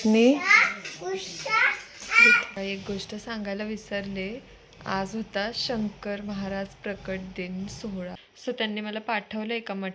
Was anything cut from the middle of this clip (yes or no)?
yes